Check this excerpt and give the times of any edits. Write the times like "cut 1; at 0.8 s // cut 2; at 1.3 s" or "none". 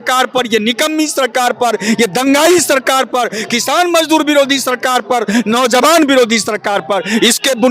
none

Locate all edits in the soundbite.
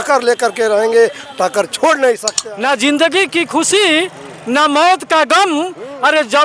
cut 1; at 2.3 s

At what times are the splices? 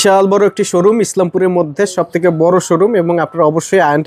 none

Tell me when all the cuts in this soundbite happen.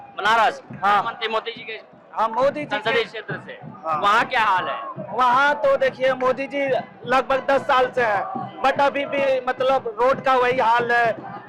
none

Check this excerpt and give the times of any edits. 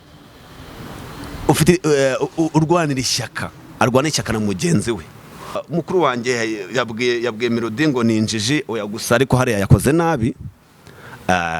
cut 1; at 5.6 s

